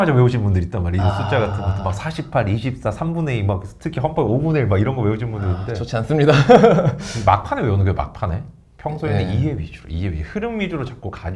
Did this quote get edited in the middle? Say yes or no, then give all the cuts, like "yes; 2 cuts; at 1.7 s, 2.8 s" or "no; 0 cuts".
no; 0 cuts